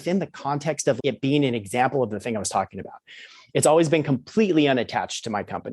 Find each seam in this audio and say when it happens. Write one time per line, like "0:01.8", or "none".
0:01.0